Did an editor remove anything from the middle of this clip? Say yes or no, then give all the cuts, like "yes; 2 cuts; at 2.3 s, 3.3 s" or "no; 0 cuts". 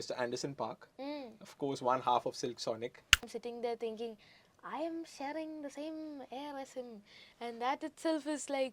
yes; 1 cut; at 3.2 s